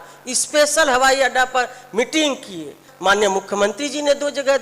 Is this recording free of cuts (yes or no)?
no